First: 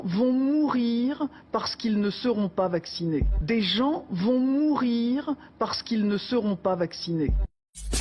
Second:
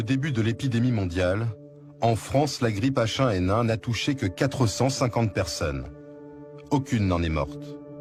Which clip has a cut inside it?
first; 1 cut; at 3.3 s

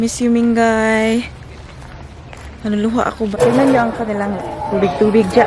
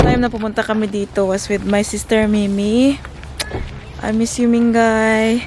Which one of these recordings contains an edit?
first; 1 cut; at 3.4 s

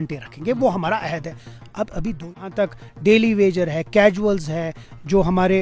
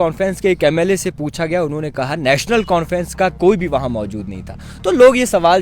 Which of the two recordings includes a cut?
first; 1 cut; at 2.1 s

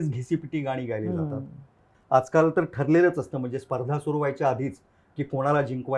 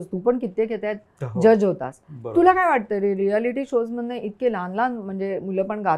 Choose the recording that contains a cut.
first; 1 cut; at 1.9 s

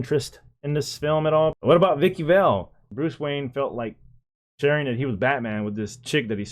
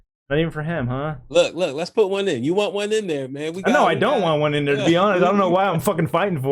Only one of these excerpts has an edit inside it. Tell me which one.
first; 2 cuts; at 1.5 s, 2.9 s

